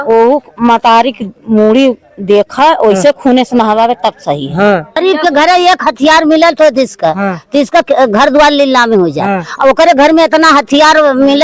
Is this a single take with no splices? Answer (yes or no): no